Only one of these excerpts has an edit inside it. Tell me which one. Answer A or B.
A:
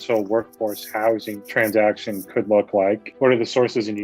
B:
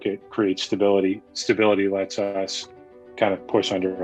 A